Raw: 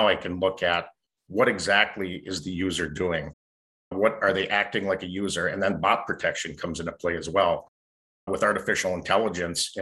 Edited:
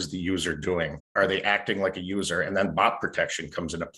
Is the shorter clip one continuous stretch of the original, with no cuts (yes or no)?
no